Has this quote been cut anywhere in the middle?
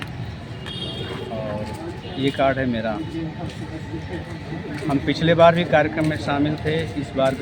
no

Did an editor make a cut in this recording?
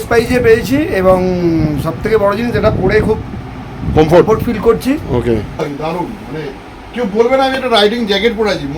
yes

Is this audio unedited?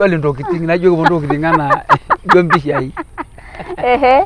yes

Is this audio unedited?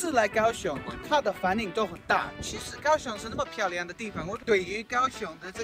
no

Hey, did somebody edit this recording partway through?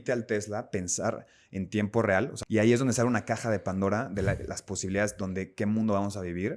yes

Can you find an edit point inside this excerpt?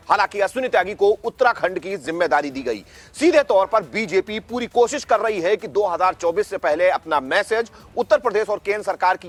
no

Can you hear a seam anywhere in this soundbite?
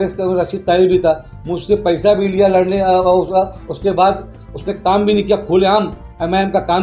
no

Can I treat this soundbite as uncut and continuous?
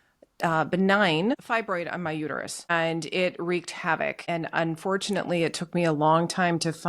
no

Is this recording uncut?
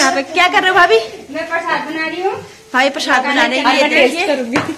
yes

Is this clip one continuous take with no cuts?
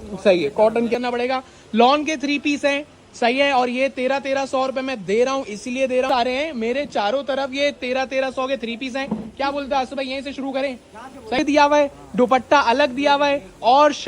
no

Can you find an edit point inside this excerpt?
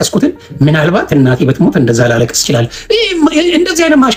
no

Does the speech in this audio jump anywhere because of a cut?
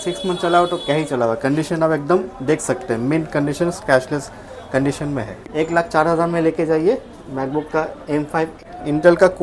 yes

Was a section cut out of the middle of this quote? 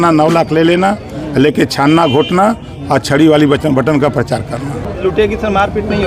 yes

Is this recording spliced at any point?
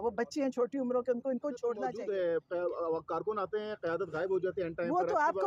yes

